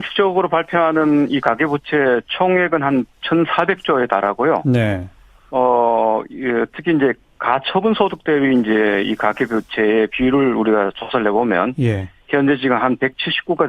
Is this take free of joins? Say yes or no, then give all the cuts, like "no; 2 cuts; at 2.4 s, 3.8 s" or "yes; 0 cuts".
no; 1 cut; at 2.4 s